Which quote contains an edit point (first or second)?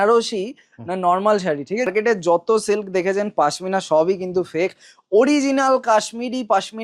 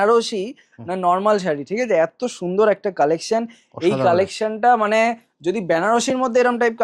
first